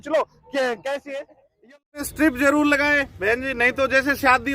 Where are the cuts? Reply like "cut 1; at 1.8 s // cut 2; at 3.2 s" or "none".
cut 1; at 2.0 s